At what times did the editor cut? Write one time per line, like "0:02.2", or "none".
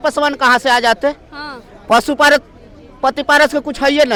none